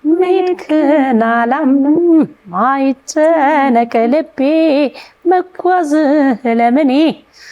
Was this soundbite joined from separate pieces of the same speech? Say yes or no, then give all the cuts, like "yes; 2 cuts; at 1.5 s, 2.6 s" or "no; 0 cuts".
no; 0 cuts